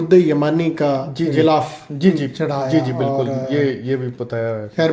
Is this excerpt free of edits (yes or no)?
yes